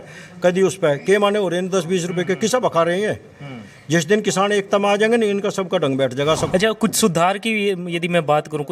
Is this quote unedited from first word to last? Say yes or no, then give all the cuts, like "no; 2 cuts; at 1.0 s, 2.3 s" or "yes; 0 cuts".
no; 1 cut; at 6.4 s